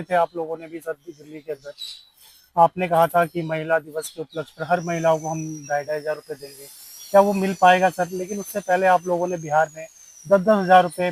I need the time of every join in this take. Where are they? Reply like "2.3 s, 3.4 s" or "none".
none